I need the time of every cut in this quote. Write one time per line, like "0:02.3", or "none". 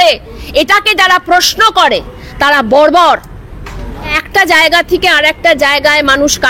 0:04.2